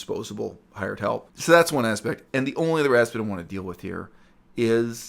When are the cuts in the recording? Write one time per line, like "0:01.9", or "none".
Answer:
0:01.3